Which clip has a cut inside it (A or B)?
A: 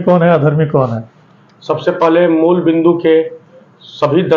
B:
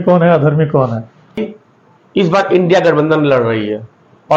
B